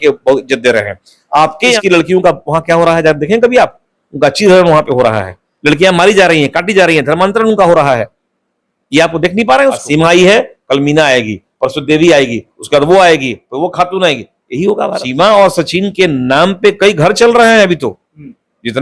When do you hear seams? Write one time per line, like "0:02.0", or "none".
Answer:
0:01.8
0:09.8
0:15.0